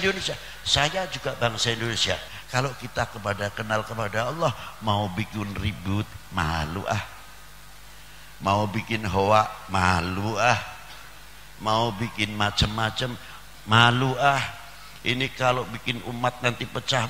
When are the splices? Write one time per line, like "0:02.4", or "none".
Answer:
0:02.3